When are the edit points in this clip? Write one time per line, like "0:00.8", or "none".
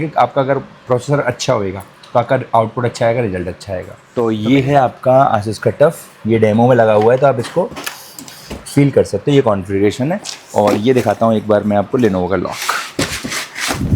0:03.9